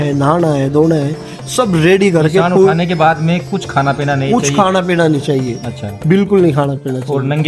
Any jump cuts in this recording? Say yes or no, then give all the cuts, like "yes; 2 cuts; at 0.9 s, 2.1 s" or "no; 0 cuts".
no; 0 cuts